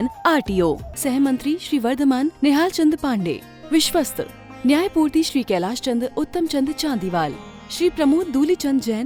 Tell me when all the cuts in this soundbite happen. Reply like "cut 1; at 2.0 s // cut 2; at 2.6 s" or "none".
none

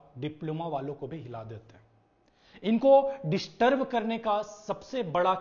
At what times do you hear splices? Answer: none

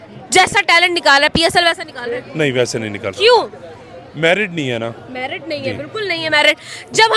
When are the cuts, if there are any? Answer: none

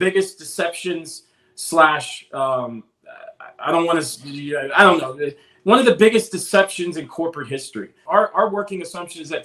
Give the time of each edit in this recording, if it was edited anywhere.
cut 1; at 8.0 s

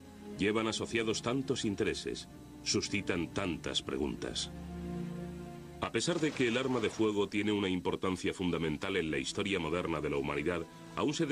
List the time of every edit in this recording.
none

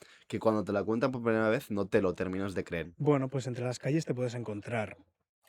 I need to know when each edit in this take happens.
cut 1; at 2.9 s

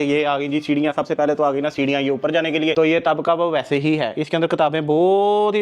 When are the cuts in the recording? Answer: cut 1; at 2.7 s

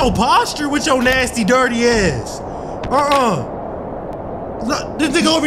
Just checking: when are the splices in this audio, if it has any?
none

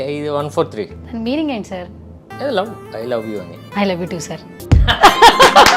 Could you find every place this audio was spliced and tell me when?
cut 1; at 1.0 s

